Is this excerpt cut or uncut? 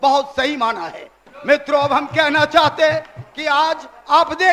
uncut